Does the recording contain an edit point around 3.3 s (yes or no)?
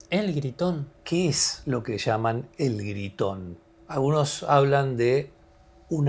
no